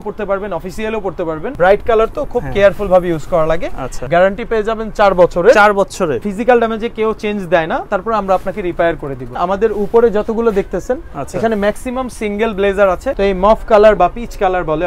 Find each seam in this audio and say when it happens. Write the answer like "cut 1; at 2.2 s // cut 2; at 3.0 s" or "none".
cut 1; at 1.5 s // cut 2; at 4.1 s // cut 3; at 6.3 s // cut 4; at 9.3 s // cut 5; at 13.1 s